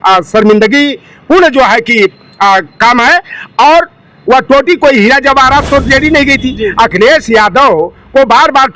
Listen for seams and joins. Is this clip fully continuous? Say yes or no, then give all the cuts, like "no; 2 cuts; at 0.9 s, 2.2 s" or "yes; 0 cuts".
yes; 0 cuts